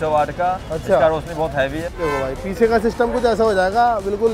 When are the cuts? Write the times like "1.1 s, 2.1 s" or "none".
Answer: 2.0 s